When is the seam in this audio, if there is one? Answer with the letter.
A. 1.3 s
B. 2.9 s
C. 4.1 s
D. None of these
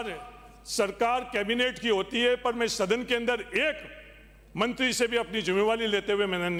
D